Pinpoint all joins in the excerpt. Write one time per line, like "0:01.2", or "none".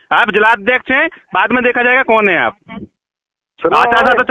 none